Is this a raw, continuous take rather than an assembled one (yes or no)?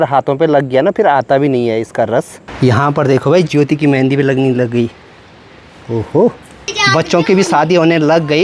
no